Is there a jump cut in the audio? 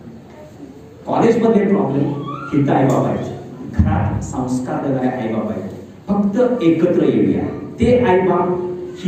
no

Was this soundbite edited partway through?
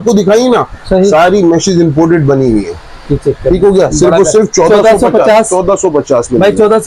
no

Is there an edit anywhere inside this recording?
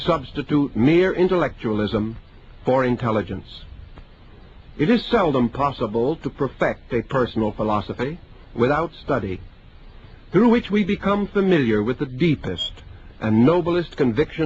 no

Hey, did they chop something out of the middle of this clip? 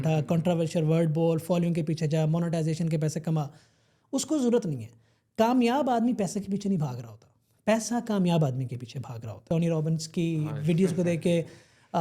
yes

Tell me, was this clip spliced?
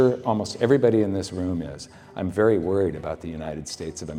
no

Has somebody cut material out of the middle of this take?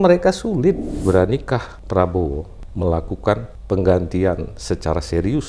yes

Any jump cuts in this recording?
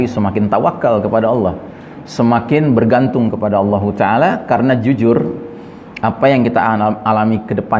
no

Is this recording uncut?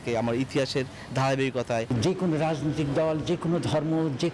yes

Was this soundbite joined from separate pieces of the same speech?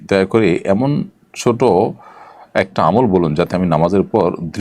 no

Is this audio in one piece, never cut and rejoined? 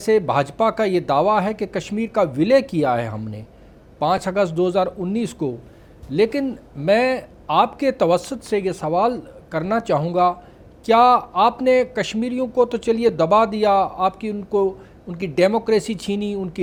yes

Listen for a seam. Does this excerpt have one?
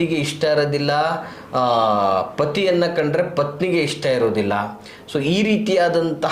no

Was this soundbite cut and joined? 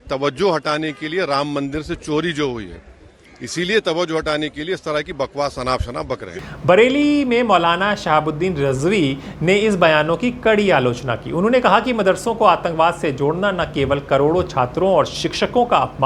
no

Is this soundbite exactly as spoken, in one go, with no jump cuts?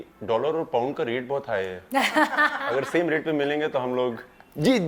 yes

